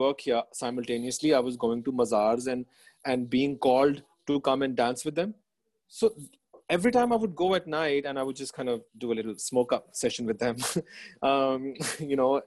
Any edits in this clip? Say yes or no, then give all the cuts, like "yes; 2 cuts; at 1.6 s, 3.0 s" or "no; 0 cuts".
no; 0 cuts